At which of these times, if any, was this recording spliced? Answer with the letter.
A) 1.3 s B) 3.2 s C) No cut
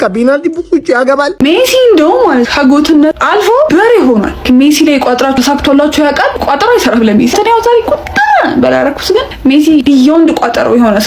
A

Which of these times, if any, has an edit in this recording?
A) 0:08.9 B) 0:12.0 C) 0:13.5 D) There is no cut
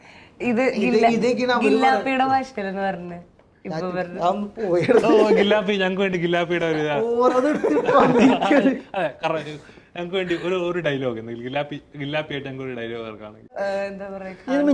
C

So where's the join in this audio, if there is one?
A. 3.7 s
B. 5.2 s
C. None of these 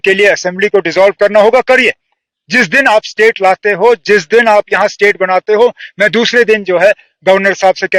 C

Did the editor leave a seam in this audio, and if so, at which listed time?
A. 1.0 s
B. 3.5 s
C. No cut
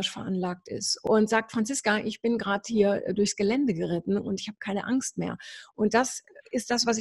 A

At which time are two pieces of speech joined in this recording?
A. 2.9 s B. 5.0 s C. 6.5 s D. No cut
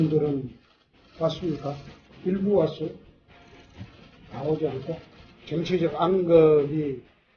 D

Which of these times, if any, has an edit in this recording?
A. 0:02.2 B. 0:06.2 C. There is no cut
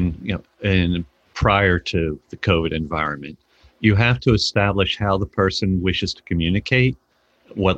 C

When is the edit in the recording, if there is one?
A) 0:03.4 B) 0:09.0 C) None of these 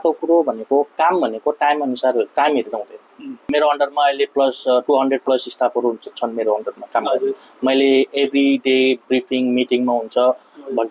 A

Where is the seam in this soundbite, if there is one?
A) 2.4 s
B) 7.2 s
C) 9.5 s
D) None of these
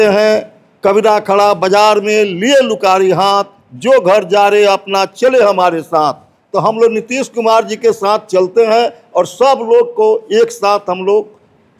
D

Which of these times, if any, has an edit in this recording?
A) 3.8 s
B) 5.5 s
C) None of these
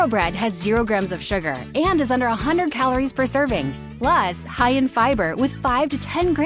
A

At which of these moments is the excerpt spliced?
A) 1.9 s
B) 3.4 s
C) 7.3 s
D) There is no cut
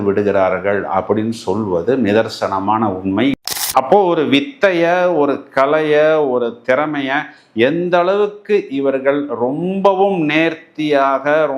B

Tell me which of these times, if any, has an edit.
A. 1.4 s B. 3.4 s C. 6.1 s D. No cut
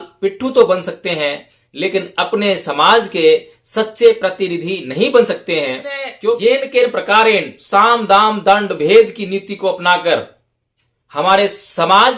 C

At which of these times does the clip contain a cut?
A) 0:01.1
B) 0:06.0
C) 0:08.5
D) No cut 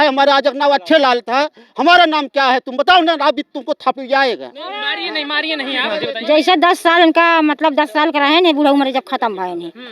B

